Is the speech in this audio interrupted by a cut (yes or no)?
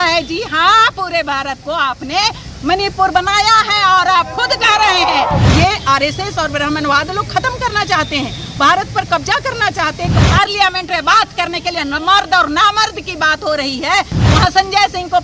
yes